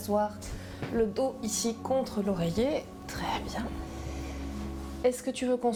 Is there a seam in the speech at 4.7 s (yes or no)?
no